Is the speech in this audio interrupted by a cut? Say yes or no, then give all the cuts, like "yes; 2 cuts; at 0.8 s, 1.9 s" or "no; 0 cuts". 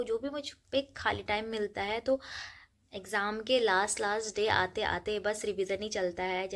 no; 0 cuts